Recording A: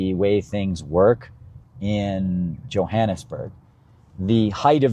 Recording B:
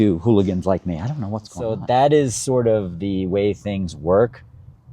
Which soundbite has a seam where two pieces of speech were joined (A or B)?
B